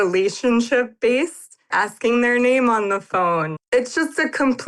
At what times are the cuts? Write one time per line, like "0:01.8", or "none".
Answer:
0:01.6
0:03.5